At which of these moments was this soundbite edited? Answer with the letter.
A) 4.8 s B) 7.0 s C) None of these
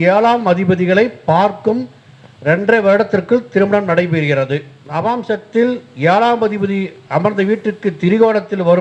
A